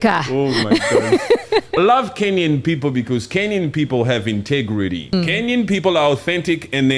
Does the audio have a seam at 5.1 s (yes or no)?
yes